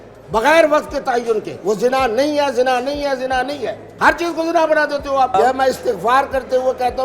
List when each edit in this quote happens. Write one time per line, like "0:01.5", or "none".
0:01.5
0:05.3